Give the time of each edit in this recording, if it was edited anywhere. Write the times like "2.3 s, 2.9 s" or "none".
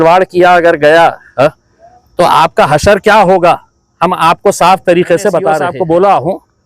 5.7 s